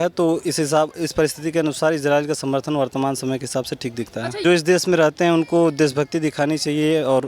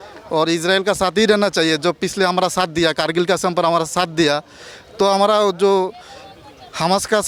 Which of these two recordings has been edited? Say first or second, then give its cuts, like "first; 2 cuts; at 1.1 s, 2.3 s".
first; 1 cut; at 4.4 s